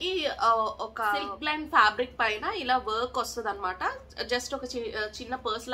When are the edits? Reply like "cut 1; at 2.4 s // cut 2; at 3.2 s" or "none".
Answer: cut 1; at 1.3 s